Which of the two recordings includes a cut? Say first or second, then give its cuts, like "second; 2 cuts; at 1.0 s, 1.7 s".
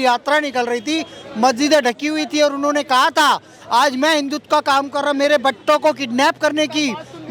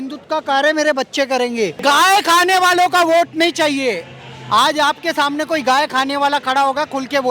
second; 1 cut; at 1.8 s